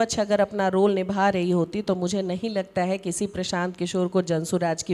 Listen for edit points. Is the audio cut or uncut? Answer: uncut